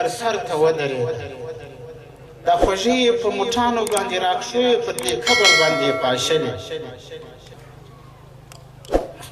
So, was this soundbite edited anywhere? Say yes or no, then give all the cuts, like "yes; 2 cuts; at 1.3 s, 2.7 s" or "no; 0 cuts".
yes; 1 cut; at 7.5 s